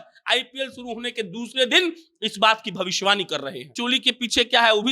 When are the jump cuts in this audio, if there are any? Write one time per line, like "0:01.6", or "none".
0:03.7